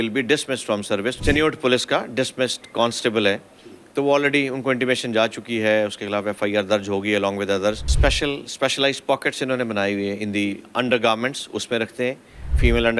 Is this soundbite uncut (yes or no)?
no